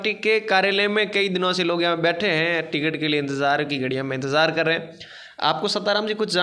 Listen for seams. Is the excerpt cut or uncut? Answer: uncut